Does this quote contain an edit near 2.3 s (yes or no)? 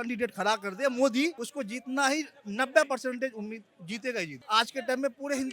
no